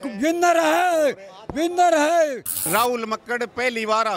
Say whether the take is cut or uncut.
cut